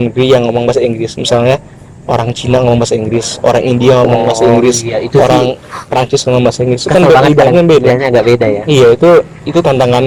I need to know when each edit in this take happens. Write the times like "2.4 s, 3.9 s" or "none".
none